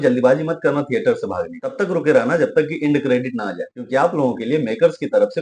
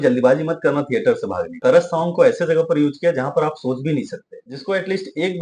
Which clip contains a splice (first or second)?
second